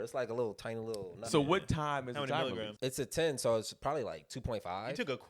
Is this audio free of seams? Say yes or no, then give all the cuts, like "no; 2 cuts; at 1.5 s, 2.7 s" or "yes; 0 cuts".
no; 1 cut; at 2.7 s